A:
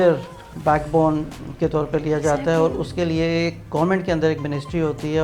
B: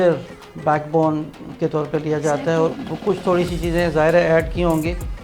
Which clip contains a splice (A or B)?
B